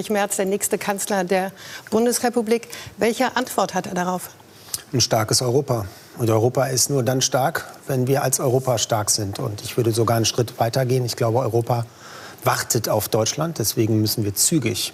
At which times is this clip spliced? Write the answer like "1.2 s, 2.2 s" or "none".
none